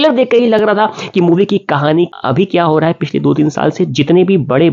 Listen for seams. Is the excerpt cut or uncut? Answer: cut